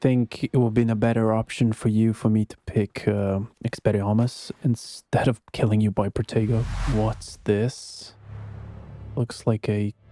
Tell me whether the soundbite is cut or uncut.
cut